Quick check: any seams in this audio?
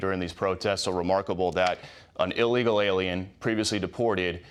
no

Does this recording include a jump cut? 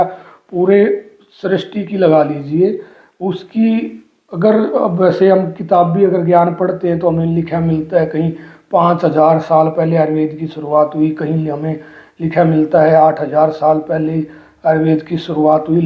no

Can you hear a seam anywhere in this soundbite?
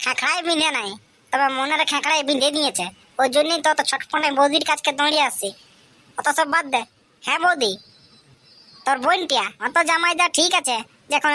yes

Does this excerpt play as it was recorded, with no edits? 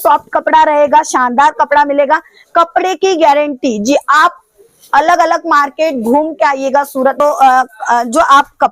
no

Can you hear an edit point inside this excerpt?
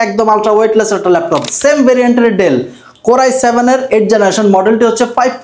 yes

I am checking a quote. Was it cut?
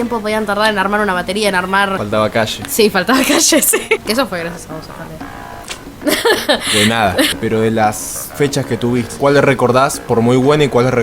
yes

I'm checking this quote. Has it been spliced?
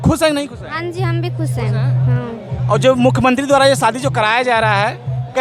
no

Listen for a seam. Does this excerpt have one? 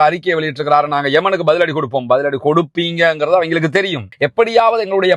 yes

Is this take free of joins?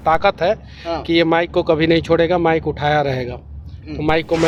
yes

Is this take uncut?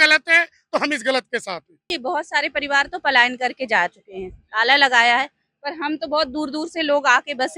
no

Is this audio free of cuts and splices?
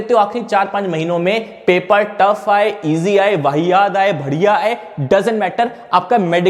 yes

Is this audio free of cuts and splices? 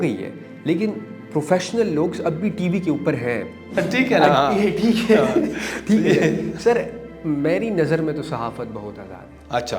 no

